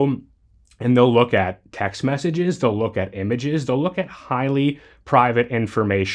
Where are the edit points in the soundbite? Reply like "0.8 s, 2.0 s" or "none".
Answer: none